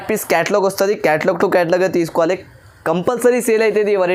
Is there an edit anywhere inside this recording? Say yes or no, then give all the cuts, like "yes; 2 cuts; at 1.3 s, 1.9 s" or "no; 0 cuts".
no; 0 cuts